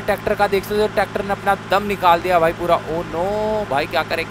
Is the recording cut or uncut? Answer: uncut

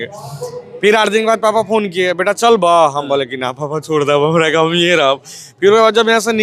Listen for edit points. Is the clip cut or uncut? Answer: uncut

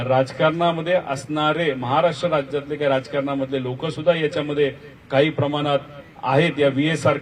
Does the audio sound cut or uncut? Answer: uncut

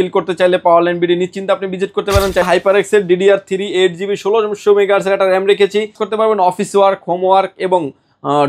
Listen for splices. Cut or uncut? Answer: cut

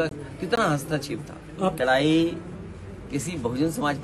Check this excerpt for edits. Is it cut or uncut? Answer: uncut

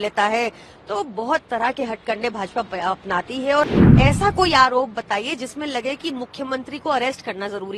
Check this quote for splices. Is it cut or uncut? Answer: cut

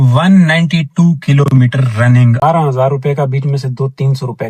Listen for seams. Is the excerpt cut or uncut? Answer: cut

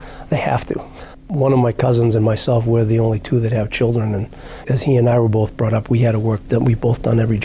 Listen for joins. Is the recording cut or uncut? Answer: uncut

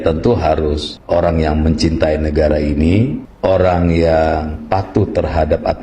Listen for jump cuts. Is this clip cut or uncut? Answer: cut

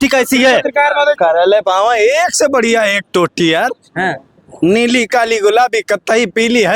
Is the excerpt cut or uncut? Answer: cut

